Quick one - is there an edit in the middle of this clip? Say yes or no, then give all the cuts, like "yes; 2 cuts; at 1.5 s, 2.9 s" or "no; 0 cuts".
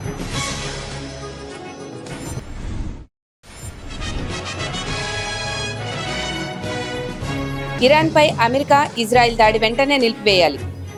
no; 0 cuts